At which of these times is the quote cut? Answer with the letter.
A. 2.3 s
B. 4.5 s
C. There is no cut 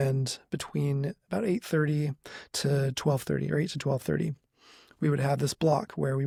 C